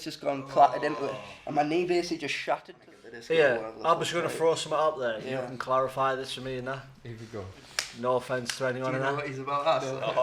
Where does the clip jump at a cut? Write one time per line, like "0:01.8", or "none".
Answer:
0:02.7